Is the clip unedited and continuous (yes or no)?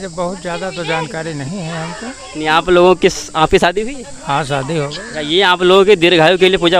yes